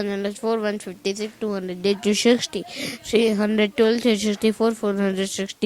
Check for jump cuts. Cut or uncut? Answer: uncut